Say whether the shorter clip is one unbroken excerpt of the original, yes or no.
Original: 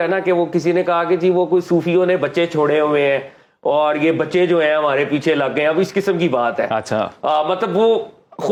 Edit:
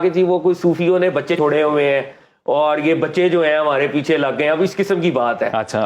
no